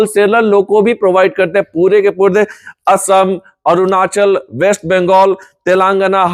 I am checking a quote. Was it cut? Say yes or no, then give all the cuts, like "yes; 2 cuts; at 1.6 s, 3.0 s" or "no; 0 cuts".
no; 0 cuts